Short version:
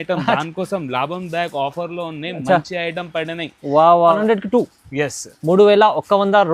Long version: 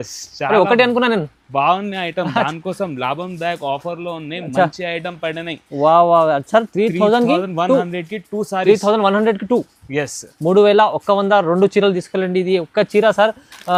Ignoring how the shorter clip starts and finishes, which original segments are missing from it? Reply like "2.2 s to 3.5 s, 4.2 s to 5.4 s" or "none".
6.3 s to 9.2 s